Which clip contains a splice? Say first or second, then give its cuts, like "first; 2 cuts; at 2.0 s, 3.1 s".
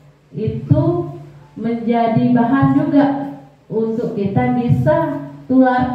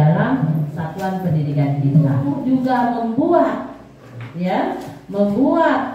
second; 1 cut; at 2.2 s